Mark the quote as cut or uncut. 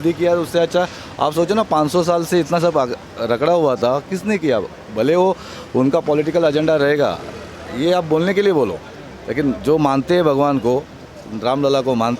uncut